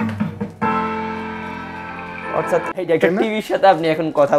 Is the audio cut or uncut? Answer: cut